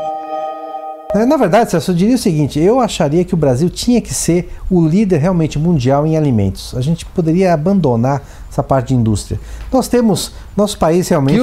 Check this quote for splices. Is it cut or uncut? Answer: cut